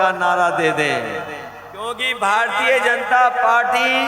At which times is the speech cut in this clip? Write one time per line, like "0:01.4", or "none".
0:02.0